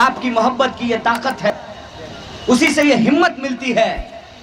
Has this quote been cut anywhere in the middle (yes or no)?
yes